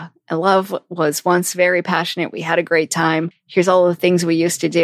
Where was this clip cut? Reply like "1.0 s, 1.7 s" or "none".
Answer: 3.4 s

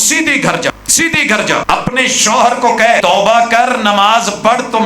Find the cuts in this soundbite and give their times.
0.7 s, 1.6 s, 3.0 s

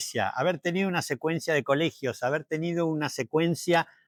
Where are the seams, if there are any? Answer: none

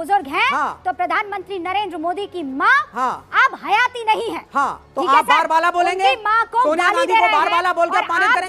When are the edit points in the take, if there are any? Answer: none

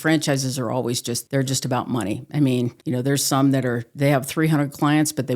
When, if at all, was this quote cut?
1.1 s, 2.8 s

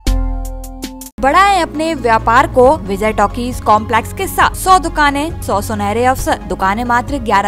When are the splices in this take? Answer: 1.2 s, 2.9 s, 4.6 s, 5.4 s, 6.5 s

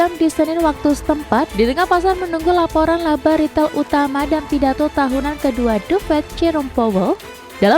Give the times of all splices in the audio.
none

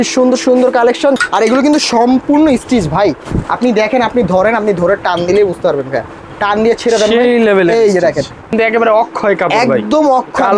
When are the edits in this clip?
1.2 s, 8.5 s

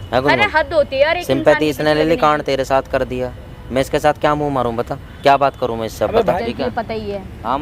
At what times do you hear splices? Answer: 6.4 s

